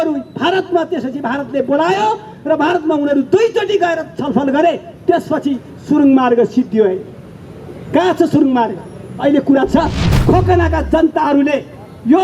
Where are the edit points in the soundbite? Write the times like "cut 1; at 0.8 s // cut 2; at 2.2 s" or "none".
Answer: cut 1; at 10.1 s